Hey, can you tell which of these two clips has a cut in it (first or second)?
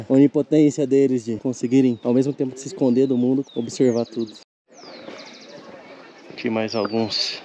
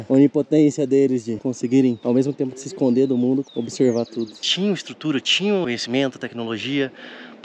second